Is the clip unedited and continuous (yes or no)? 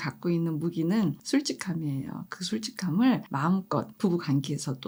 yes